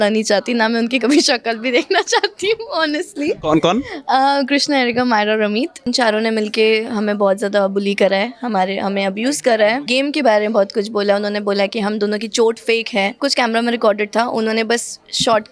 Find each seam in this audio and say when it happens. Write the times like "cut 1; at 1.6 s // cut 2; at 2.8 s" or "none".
cut 1; at 5.9 s // cut 2; at 9.9 s // cut 3; at 13.2 s